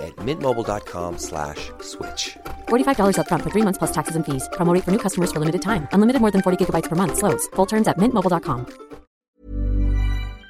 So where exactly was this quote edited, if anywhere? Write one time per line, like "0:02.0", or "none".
0:09.2